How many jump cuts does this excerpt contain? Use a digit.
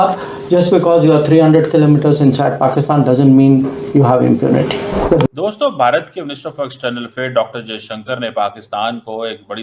1